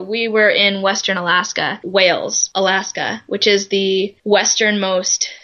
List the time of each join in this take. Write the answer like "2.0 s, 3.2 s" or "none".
1.8 s, 2.4 s, 4.2 s